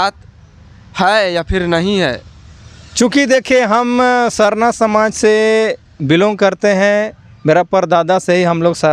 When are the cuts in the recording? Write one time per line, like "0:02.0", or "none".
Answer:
none

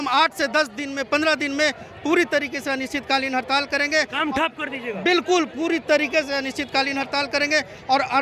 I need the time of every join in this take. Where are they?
none

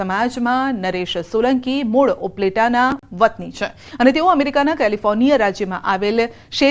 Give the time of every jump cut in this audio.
none

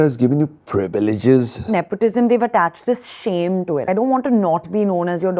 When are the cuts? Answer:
0:01.7
0:03.9

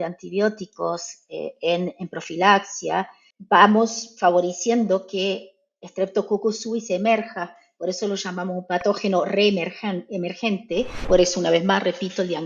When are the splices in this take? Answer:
0:11.0

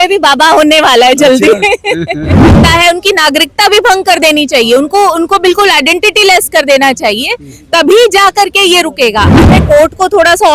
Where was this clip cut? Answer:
0:02.6
0:09.4

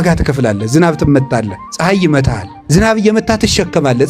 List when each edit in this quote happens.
0:01.6
0:02.5

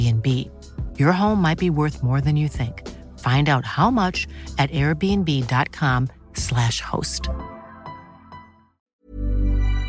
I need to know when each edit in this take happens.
0:08.8

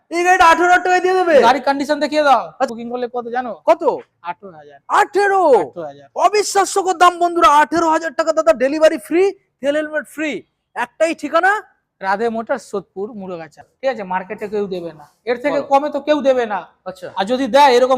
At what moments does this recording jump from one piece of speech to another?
0:02.7
0:13.6

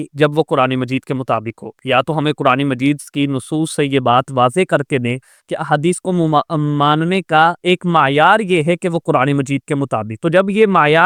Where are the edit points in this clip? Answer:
none

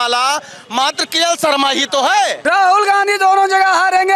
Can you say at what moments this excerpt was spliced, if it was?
0:02.4

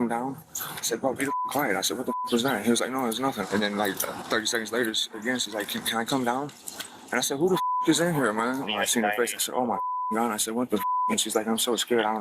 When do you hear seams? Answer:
0:00.9
0:03.5
0:08.7

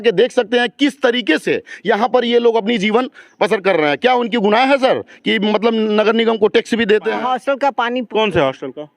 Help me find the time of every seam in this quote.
0:07.2

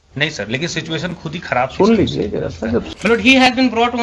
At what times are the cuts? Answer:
0:02.9

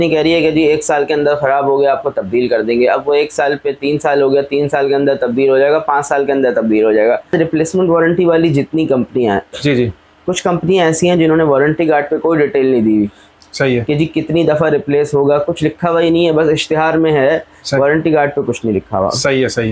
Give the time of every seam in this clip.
0:07.3

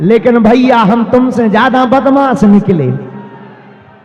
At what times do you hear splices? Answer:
none

